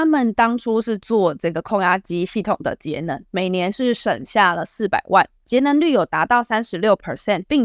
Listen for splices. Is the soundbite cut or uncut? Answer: uncut